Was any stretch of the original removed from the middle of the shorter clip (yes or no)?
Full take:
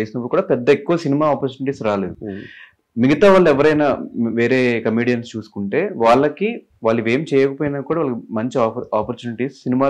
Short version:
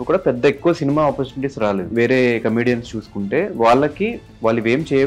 yes